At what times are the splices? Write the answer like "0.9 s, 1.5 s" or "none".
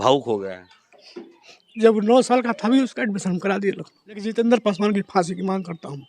4.3 s